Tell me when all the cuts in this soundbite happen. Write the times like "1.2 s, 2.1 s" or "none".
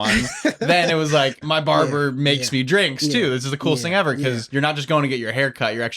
1.4 s, 4.4 s